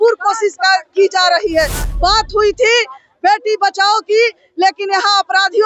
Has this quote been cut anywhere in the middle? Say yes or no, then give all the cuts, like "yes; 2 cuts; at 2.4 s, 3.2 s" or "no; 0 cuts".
no; 0 cuts